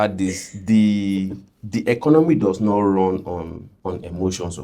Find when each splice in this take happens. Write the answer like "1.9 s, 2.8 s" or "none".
3.6 s